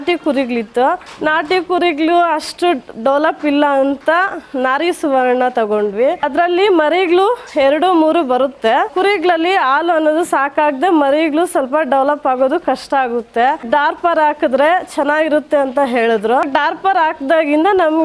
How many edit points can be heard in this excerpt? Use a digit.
5